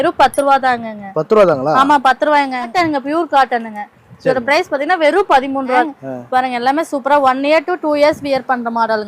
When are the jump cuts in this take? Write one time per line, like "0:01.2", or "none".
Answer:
0:02.7
0:05.9